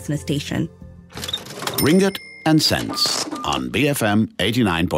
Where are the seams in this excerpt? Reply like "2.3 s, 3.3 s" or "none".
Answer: 1.0 s